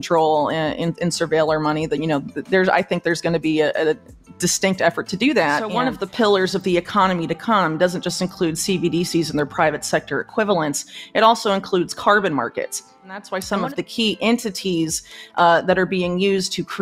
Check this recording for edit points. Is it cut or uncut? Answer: cut